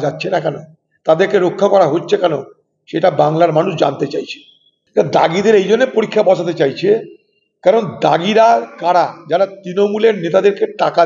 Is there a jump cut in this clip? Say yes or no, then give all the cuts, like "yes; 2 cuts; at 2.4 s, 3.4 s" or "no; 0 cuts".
yes; 1 cut; at 4.7 s